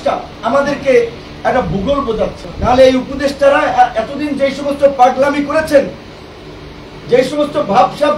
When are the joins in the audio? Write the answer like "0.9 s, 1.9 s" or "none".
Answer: none